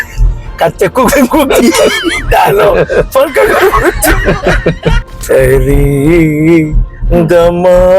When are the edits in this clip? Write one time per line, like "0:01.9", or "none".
0:05.2